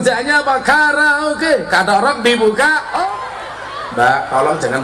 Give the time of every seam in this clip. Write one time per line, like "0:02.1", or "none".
0:03.2